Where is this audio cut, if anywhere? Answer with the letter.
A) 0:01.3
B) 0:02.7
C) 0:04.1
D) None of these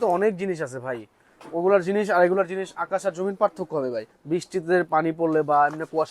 C